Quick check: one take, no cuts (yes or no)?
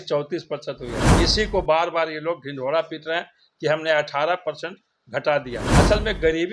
no